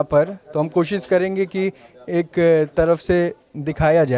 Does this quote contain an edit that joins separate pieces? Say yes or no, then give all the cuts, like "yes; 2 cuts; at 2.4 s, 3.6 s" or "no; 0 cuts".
no; 0 cuts